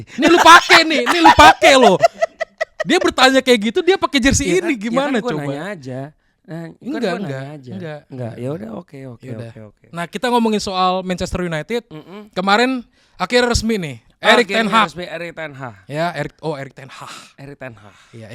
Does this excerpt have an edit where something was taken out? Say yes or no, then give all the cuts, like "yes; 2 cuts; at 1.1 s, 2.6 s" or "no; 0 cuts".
no; 0 cuts